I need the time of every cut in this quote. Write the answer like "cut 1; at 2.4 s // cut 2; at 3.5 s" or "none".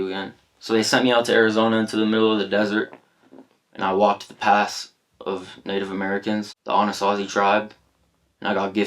cut 1; at 6.6 s

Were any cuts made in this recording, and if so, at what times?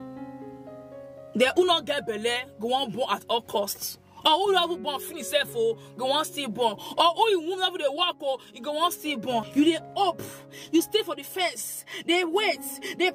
cut 1; at 9.5 s

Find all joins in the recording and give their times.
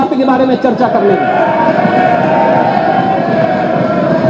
none

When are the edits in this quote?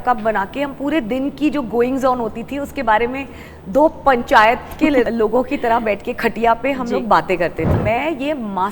cut 1; at 5.1 s // cut 2; at 7.7 s

